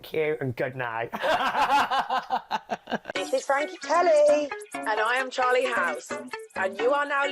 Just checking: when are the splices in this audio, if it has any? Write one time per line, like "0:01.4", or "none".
0:03.0